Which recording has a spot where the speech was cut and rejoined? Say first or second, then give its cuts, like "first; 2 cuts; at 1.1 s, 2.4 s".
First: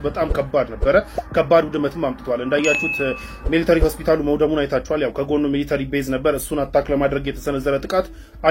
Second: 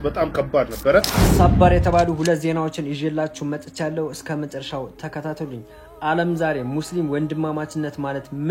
second; 1 cut; at 1.2 s